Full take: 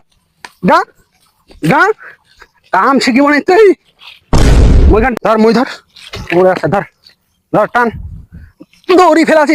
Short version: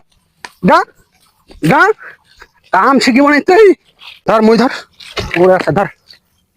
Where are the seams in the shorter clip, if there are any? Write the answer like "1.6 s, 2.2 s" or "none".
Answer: 4.2 s